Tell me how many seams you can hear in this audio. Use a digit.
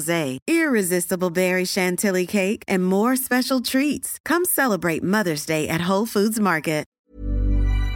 1